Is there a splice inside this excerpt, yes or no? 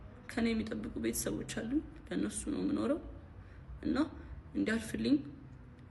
no